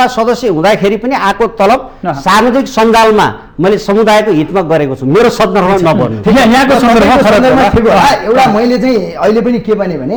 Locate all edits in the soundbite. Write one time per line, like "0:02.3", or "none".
none